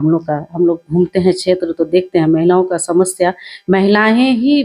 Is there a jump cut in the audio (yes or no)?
no